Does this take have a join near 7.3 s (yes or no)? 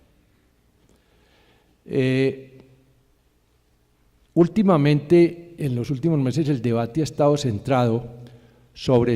yes